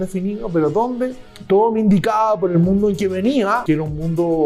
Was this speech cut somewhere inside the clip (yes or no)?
yes